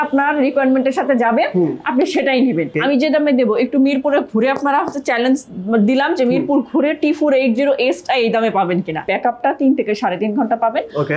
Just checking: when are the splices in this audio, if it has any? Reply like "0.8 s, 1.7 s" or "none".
2.7 s, 9.0 s